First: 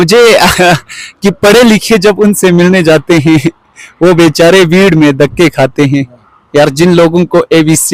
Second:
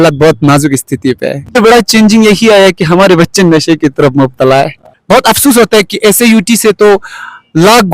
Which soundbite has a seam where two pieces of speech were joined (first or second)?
second